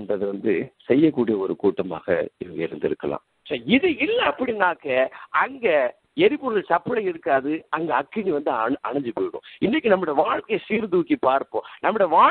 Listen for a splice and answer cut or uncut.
cut